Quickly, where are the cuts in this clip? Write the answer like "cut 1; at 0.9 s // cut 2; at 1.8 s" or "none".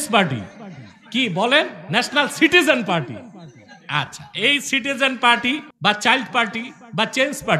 cut 1; at 5.7 s